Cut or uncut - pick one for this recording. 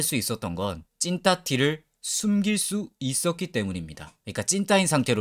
uncut